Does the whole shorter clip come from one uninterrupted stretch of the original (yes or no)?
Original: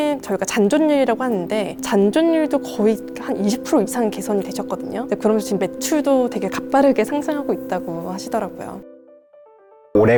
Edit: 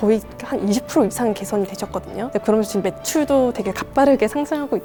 yes